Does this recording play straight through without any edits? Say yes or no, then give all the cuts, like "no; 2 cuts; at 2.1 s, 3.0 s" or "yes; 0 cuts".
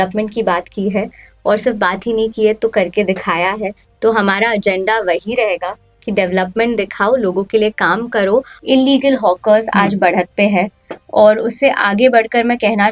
no; 1 cut; at 8.6 s